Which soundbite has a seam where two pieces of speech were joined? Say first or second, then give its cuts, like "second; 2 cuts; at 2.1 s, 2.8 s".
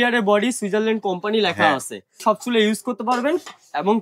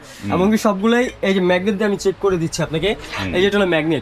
first; 1 cut; at 2.2 s